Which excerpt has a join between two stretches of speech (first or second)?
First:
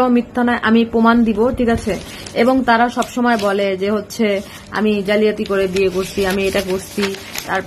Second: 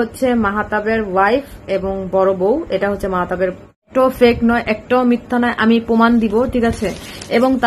second